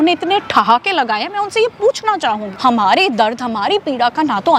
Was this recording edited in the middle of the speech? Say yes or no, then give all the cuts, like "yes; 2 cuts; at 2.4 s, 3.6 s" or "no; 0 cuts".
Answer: yes; 1 cut; at 2.5 s